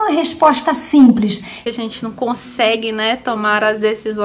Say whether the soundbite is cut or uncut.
cut